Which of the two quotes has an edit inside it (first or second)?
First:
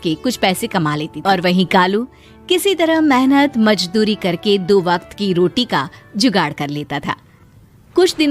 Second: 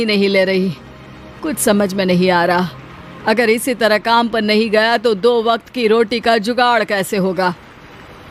first